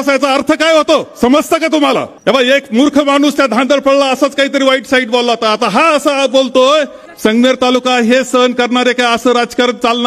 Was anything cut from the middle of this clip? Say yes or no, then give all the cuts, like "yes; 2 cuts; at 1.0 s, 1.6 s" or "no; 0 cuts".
yes; 2 cuts; at 2.1 s, 7.0 s